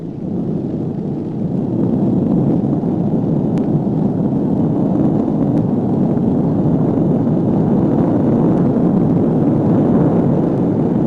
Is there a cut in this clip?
yes; 1 cut; at 3.4 s

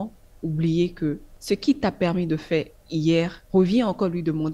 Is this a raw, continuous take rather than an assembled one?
no; 2 cuts; at 1.3 s, 3.4 s

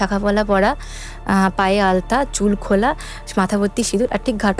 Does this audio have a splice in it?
no; 0 cuts

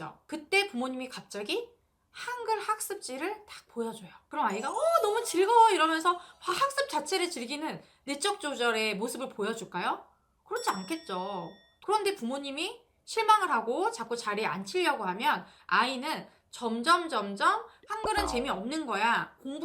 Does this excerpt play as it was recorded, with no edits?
no; 2 cuts; at 11.7 s, 17.9 s

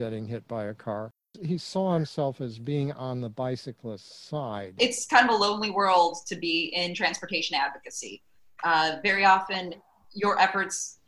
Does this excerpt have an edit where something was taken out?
yes; 2 cuts; at 1.4 s, 4.7 s

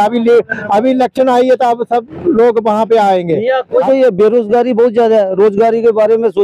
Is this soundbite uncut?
no; 1 cut; at 3.8 s

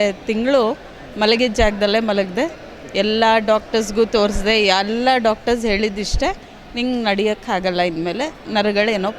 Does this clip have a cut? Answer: no; 0 cuts

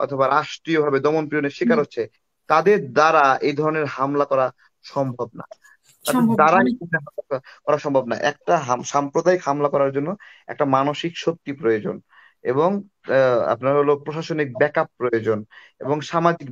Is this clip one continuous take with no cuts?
yes; 0 cuts

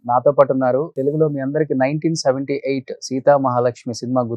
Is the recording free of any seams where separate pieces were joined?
no; 1 cut; at 0.9 s

